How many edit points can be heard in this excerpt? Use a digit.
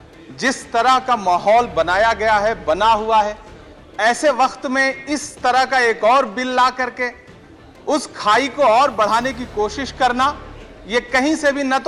0